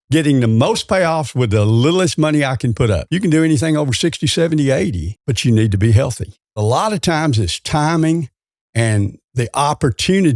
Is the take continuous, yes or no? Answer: no